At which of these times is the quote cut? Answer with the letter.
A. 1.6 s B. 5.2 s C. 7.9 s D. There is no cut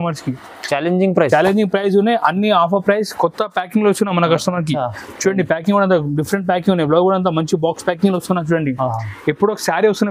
D